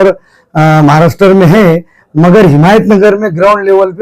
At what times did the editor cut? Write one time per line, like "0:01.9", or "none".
none